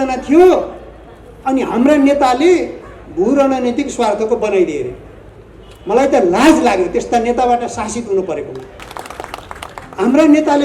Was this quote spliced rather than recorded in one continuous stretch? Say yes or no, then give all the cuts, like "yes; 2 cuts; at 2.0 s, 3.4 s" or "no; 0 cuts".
yes; 1 cut; at 8.9 s